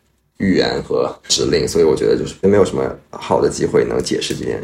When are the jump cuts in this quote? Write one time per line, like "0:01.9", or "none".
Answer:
none